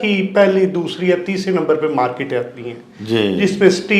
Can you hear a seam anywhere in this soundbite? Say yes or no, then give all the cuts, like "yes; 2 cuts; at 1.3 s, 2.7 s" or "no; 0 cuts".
no; 0 cuts